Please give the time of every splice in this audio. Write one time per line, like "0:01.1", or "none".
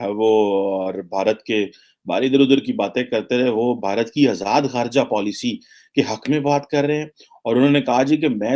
none